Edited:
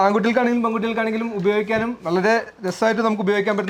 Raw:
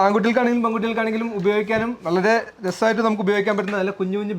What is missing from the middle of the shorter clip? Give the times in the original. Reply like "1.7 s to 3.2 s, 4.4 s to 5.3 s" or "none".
none